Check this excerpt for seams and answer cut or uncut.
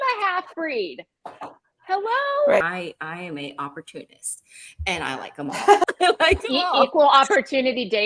cut